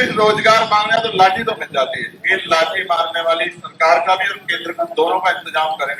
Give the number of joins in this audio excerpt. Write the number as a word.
zero